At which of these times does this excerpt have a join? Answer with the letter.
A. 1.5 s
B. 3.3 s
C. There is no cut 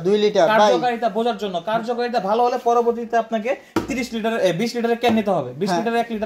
C